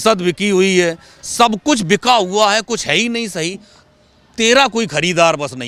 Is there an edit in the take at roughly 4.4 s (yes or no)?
no